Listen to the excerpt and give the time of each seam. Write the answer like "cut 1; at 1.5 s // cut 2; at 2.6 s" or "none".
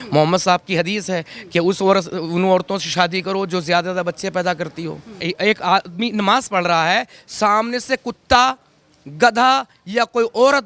cut 1; at 5.3 s